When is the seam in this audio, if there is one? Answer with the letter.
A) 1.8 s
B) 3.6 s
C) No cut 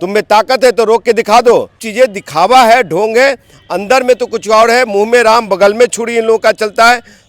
A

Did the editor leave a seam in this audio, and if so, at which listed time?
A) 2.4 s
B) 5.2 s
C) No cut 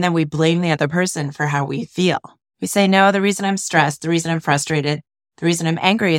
A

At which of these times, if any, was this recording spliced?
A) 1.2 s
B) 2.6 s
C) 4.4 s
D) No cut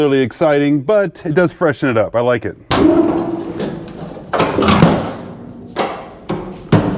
B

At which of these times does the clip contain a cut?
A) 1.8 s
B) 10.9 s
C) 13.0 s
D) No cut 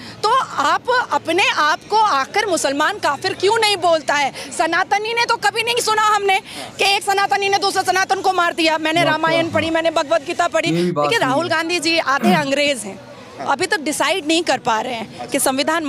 B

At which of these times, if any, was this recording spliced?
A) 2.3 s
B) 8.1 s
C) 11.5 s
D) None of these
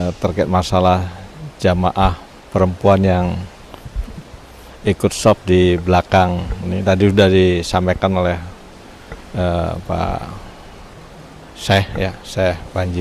D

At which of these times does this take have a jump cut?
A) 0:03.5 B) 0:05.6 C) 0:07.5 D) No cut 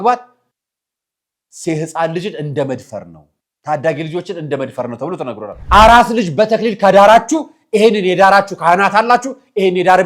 B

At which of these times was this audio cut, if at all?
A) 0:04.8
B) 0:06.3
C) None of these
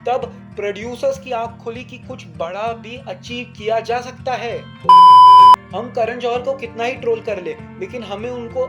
A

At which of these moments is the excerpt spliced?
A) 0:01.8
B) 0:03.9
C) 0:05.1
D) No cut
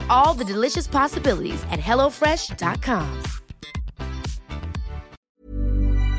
C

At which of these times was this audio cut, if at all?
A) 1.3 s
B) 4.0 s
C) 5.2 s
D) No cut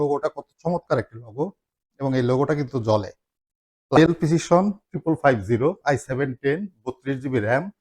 B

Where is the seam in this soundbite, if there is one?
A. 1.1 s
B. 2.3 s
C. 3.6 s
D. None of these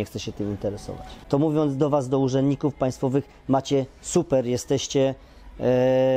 A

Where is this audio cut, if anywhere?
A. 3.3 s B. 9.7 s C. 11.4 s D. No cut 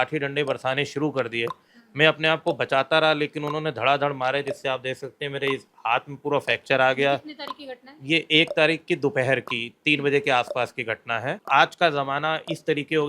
C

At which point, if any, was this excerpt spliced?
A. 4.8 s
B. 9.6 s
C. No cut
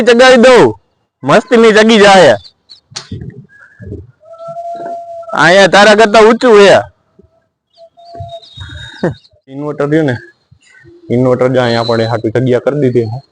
B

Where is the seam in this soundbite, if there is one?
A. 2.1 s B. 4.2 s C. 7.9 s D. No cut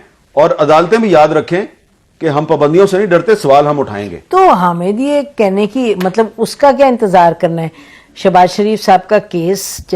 D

